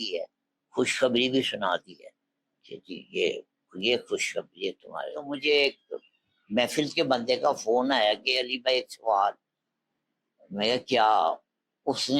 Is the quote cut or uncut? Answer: cut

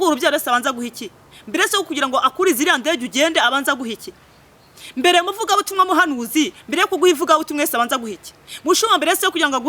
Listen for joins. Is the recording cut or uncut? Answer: uncut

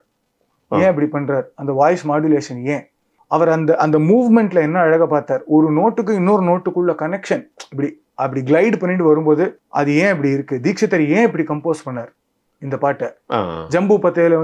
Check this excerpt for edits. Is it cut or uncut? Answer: uncut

